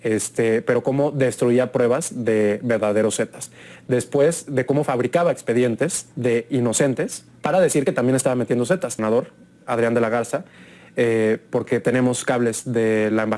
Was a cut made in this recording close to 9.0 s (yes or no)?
yes